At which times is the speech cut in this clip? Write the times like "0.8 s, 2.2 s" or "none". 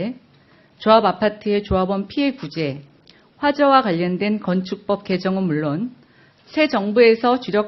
3.9 s